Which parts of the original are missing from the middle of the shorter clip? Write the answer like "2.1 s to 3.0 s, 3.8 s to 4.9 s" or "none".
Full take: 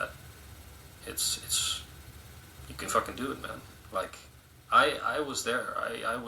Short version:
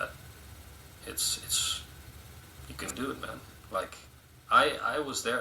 2.9 s to 3.1 s